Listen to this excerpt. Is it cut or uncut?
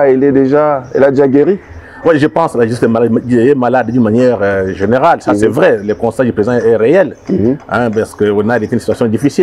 uncut